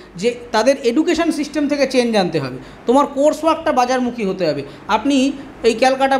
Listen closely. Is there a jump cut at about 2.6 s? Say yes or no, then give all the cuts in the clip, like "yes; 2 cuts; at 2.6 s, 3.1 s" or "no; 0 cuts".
no; 0 cuts